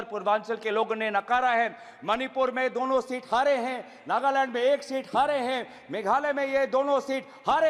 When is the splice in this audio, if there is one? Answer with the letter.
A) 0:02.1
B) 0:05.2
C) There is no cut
C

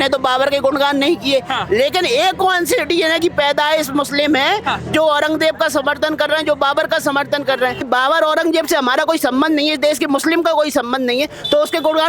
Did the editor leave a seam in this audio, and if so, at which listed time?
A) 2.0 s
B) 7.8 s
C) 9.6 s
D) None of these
B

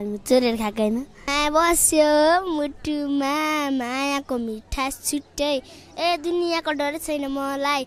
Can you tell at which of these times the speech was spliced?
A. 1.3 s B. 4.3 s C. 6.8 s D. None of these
A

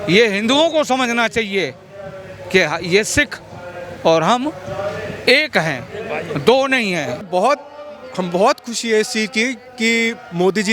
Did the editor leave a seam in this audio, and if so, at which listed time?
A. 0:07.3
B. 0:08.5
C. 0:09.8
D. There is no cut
A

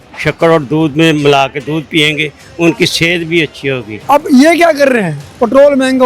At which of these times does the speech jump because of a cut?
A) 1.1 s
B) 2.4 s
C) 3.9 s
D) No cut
C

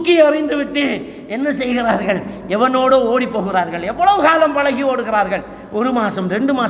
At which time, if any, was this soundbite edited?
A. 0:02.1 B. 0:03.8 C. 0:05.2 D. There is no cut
D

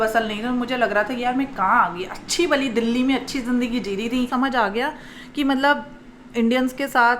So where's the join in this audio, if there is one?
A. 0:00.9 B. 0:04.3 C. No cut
B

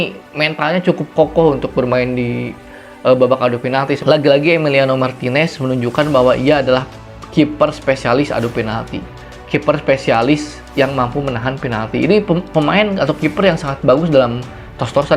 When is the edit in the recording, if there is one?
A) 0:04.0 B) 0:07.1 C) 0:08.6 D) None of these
A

